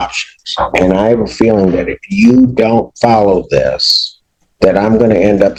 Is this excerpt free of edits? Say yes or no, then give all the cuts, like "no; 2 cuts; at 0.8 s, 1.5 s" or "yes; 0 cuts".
yes; 0 cuts